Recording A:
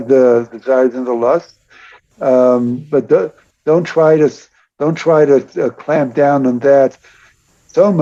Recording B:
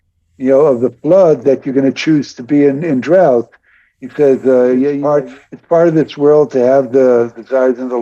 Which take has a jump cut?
B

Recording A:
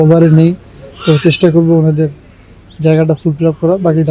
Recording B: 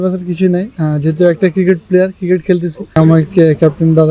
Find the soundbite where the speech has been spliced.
B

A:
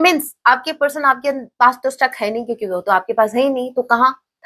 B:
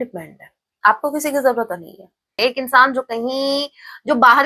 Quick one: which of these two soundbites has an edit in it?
B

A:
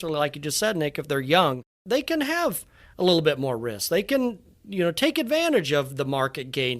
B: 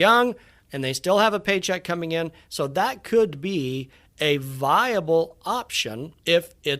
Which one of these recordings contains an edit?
A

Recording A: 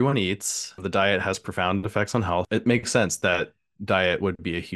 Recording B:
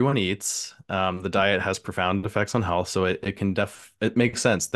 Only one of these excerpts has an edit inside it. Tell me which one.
A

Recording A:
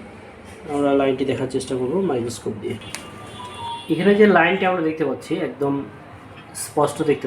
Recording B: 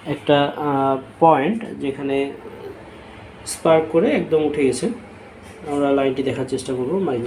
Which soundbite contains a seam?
A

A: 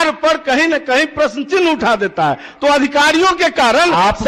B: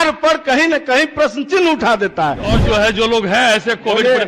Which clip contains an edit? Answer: B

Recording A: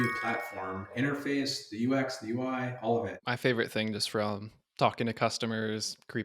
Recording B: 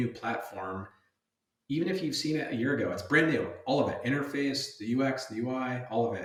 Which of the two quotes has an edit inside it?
A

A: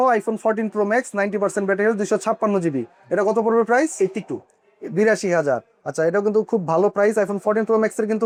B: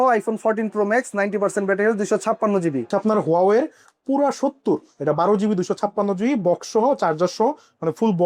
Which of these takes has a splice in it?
B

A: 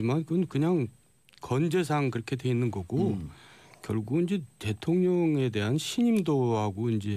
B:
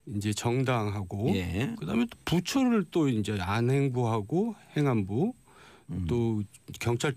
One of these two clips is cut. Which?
B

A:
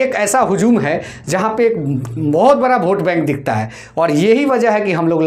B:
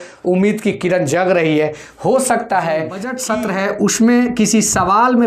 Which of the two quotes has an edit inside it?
B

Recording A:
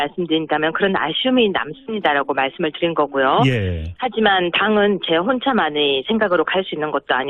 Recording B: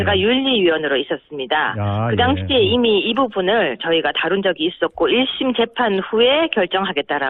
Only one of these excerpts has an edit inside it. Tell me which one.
B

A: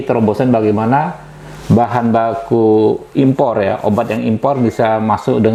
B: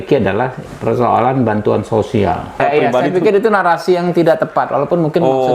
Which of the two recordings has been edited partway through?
B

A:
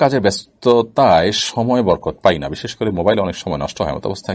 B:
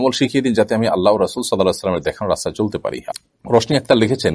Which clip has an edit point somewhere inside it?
B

